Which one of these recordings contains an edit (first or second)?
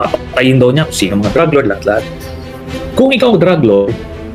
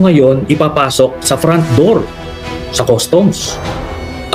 first